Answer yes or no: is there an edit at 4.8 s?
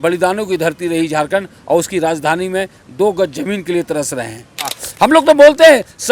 yes